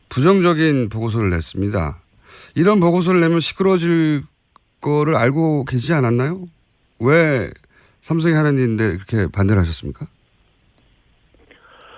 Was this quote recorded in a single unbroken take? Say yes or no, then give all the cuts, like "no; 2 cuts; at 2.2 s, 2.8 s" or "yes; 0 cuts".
no; 1 cut; at 9.7 s